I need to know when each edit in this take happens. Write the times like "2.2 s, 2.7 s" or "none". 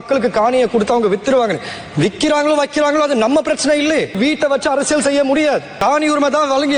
4.2 s, 5.7 s